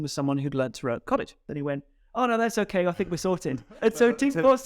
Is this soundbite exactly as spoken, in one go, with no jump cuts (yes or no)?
no